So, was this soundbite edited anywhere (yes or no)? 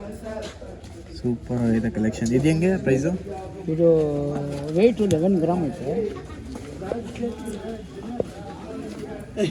no